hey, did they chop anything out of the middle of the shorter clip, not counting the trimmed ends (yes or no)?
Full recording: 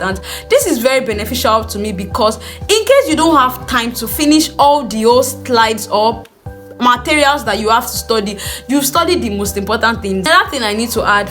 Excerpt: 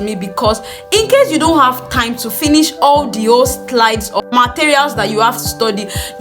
yes